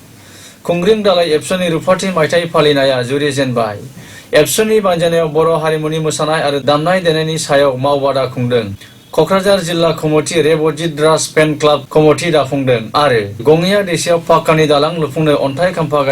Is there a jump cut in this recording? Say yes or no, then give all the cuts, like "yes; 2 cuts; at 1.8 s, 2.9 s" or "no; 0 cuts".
yes; 2 cuts; at 11.9 s, 13.4 s